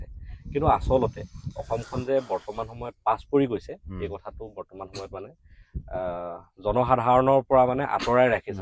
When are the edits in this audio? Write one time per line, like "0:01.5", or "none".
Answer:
none